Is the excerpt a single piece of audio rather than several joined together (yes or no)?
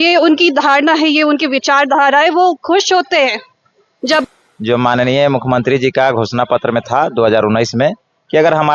no